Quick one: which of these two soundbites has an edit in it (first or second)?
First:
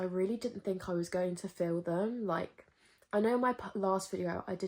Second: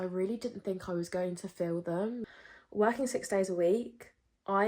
second